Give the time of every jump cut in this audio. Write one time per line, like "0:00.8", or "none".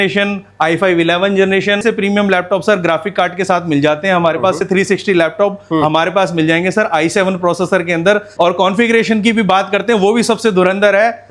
0:01.8
0:04.6
0:08.3